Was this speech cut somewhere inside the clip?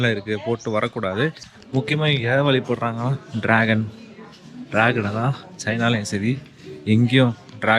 yes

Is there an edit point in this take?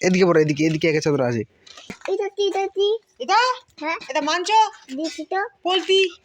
yes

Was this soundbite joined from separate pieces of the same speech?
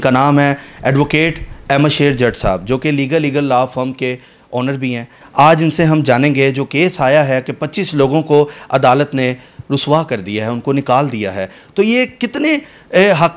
no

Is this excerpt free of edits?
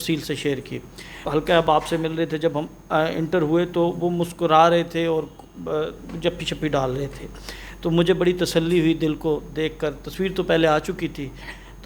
no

